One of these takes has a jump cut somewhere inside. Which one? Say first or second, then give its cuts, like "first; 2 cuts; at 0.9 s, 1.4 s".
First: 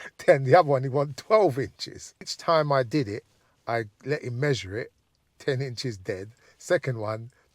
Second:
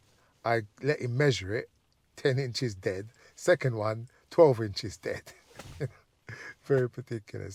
first; 1 cut; at 2.3 s